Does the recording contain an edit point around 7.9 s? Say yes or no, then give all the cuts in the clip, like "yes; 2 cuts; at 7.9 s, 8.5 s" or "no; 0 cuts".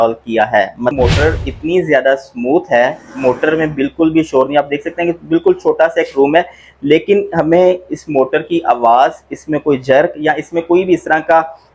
no; 1 cut; at 0.9 s